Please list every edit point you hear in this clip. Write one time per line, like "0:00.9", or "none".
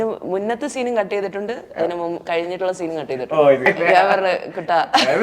0:03.7